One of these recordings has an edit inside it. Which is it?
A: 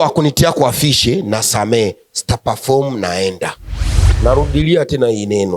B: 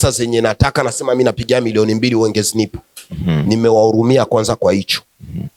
A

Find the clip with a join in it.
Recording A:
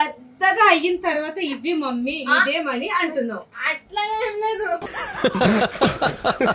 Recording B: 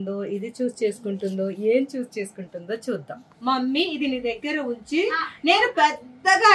B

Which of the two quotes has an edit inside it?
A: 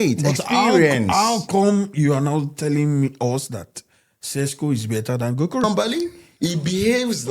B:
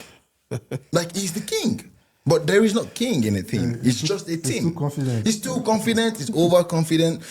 A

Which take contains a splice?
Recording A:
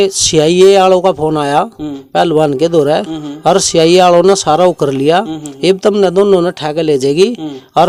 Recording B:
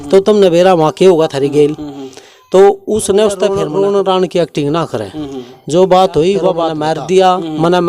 B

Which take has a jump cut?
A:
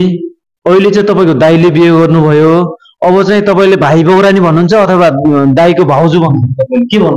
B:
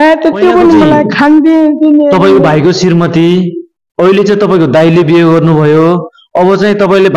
B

